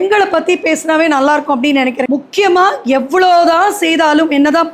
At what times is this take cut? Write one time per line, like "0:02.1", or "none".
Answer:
0:02.0